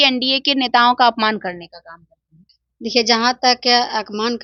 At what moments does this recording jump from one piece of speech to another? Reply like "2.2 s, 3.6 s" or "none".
none